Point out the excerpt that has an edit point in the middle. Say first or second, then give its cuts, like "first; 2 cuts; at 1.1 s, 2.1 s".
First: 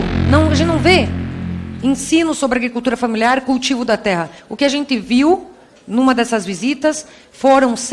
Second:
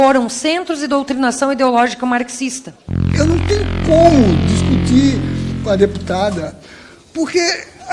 second; 1 cut; at 3.1 s